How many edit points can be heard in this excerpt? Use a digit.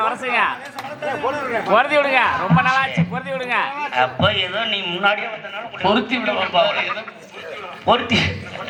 0